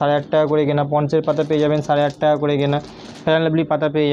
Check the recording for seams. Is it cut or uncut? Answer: uncut